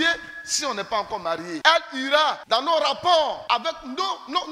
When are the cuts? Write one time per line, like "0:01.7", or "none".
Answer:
0:01.6
0:02.4
0:03.4